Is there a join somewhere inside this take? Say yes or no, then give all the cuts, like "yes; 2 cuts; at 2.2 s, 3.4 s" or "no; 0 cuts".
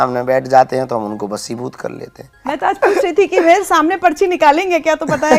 yes; 1 cut; at 2.5 s